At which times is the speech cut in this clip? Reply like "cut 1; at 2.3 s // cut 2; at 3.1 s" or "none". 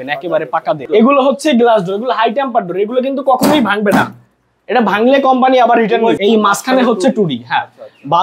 cut 1; at 0.9 s // cut 2; at 6.2 s